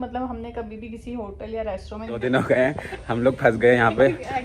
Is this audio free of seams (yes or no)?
no